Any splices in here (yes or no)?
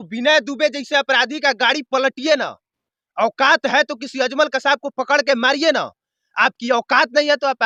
no